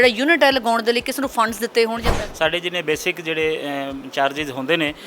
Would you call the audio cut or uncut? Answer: cut